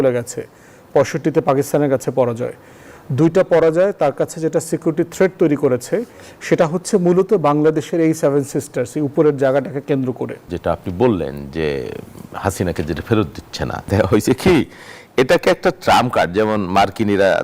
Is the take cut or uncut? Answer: cut